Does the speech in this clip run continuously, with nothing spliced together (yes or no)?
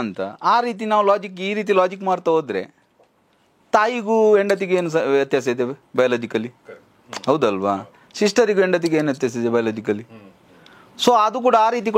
yes